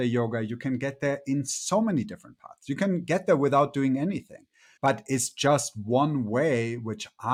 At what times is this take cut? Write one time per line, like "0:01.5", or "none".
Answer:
none